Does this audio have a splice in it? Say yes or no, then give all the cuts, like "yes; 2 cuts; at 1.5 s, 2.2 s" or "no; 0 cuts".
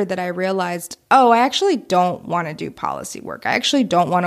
no; 0 cuts